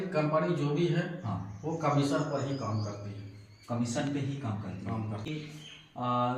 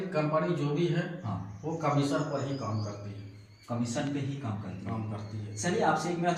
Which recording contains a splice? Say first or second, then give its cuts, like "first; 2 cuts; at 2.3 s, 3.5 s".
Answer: first; 1 cut; at 5.3 s